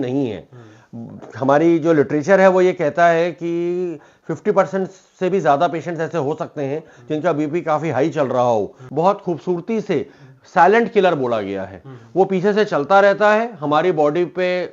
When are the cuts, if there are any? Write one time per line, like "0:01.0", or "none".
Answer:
0:08.8